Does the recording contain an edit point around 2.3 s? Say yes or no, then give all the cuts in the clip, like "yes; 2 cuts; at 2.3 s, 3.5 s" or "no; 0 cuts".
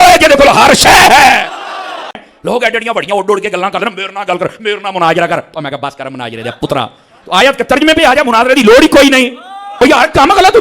yes; 2 cuts; at 2.3 s, 9.6 s